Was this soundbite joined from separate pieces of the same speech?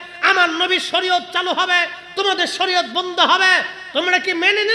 no; 0 cuts

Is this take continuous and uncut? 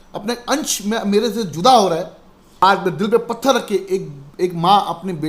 no; 1 cut; at 2.6 s

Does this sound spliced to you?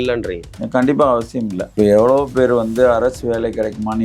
yes; 1 cut; at 1.7 s

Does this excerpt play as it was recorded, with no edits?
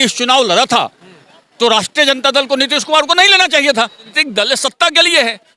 no; 1 cut; at 4.1 s

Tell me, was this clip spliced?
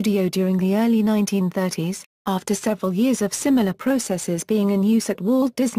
yes; 2 cuts; at 1.1 s, 5.0 s

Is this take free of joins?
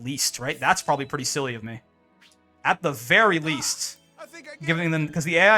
yes; 0 cuts

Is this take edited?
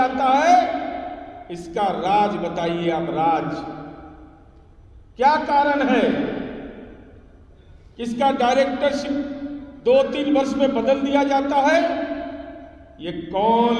no; 0 cuts

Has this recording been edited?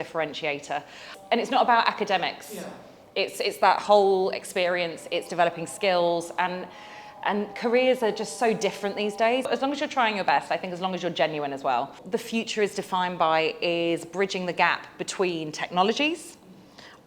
yes; 3 cuts; at 1.1 s, 9.5 s, 12.0 s

